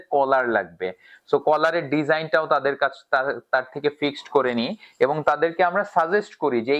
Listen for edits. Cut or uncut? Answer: uncut